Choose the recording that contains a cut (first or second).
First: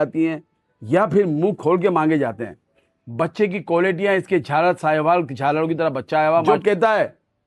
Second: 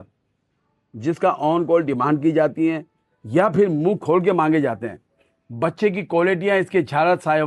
first